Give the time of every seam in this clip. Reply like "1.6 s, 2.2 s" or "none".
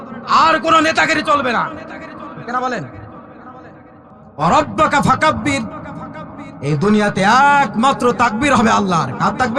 4.2 s